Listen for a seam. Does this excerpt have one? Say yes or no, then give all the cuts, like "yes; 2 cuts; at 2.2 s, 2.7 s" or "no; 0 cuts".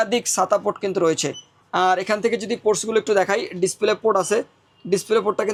no; 0 cuts